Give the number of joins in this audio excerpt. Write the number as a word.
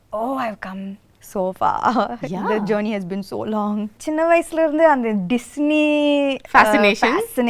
one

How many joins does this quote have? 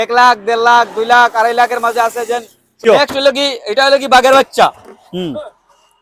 one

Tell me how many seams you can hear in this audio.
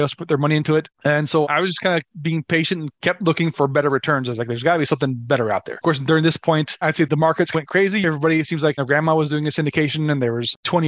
one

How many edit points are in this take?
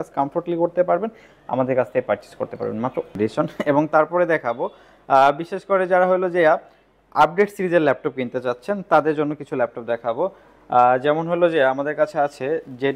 one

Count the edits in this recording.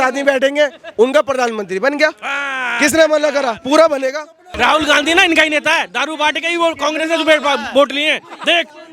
one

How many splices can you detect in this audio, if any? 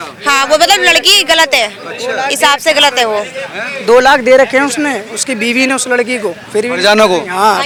zero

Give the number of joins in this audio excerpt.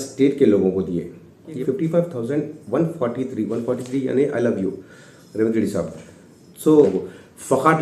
two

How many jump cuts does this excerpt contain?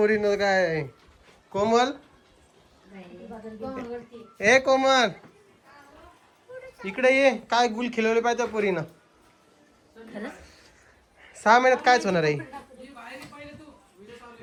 zero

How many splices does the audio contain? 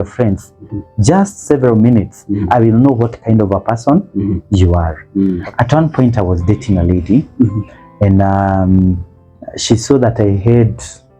one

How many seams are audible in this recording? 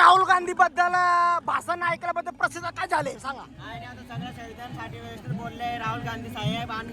zero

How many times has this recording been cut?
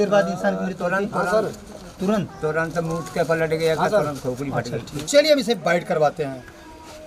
one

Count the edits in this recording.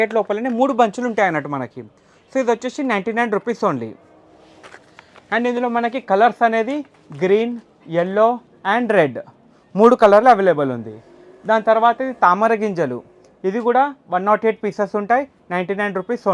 zero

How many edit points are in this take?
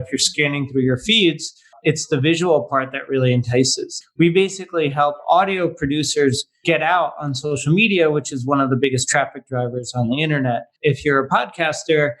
four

